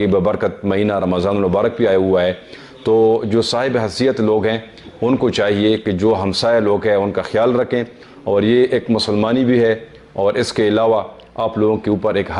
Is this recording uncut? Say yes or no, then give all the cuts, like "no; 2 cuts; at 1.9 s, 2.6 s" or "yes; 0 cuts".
yes; 0 cuts